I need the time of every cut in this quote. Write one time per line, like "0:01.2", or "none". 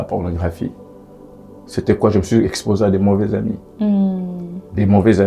none